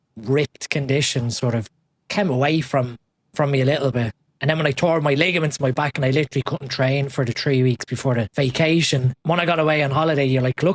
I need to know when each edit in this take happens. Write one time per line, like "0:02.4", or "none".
0:08.3
0:09.1